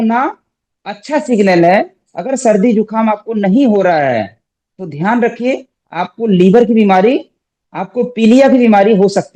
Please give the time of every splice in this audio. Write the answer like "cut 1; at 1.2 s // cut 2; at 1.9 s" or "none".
none